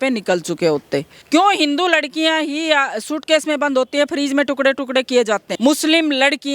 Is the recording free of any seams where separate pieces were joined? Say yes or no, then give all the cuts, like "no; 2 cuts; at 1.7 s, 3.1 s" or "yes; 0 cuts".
no; 2 cuts; at 1.1 s, 5.5 s